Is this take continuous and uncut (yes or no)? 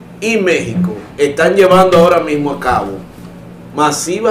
yes